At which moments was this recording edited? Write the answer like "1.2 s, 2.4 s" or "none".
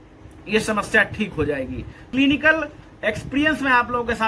2.0 s